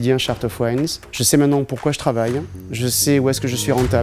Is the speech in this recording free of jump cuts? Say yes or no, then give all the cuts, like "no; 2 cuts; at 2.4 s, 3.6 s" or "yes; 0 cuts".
yes; 0 cuts